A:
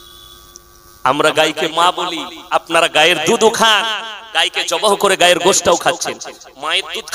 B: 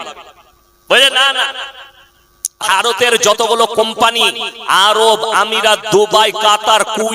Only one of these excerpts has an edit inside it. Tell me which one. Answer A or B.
B